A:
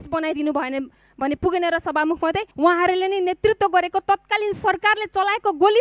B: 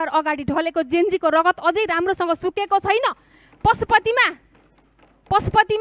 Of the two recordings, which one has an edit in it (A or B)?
A